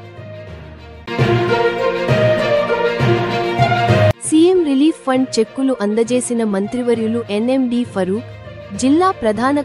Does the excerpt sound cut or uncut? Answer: cut